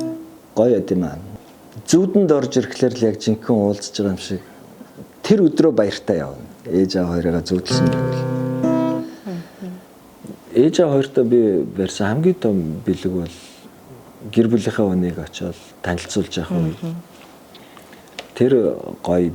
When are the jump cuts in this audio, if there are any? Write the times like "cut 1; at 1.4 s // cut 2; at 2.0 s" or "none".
cut 1; at 9.9 s